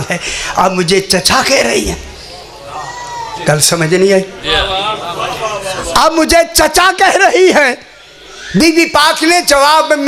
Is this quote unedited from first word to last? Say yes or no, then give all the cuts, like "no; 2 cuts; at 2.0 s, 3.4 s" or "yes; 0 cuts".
yes; 0 cuts